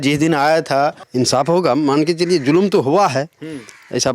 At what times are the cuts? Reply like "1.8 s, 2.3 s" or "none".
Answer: 1.0 s